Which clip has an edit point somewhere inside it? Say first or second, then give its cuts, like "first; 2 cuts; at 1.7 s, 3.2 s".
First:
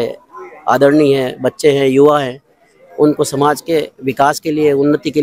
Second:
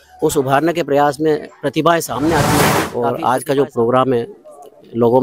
second; 1 cut; at 2.8 s